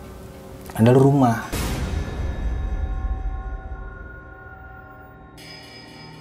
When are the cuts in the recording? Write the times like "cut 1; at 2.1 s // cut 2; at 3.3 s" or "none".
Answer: none